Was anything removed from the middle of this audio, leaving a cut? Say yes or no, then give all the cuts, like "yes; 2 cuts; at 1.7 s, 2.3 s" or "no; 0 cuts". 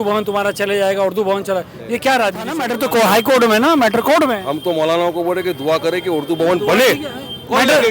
yes; 1 cut; at 2.7 s